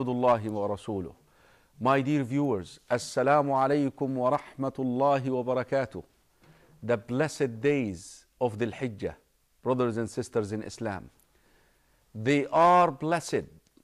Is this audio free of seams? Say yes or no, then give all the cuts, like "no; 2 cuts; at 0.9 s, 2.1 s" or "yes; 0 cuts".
no; 1 cut; at 11.5 s